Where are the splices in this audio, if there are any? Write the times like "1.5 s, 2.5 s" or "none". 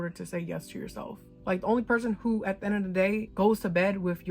1.2 s